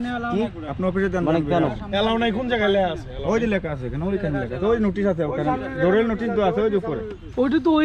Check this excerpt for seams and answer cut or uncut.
uncut